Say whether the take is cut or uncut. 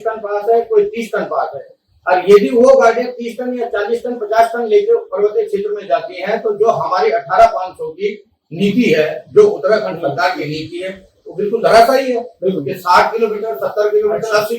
cut